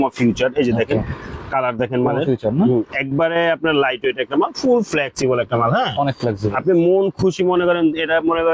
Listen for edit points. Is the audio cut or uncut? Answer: uncut